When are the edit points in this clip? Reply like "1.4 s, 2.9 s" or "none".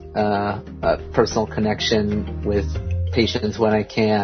none